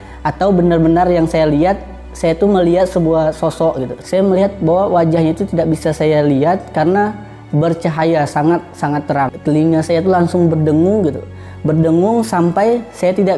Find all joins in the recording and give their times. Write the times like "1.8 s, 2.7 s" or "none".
3.9 s, 9.4 s

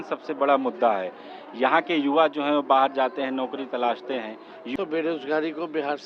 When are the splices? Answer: 4.7 s

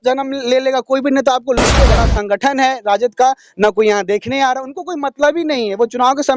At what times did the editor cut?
1.8 s

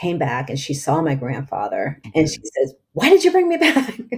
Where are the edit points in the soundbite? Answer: 2.0 s

